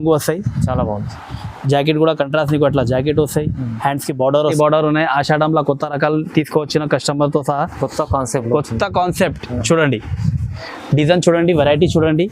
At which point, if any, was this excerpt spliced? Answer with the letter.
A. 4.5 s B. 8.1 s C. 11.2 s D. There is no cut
A